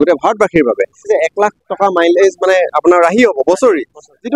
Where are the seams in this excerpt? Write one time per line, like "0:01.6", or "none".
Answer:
0:01.1